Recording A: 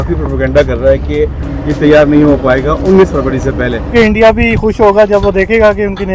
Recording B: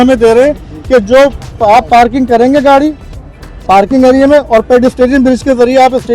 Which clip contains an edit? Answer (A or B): A